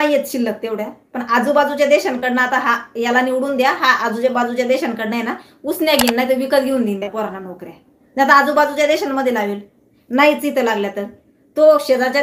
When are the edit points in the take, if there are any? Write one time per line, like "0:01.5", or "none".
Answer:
none